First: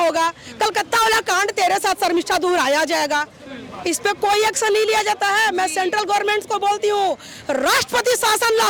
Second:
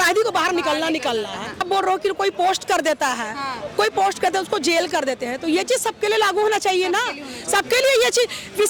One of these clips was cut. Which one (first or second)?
second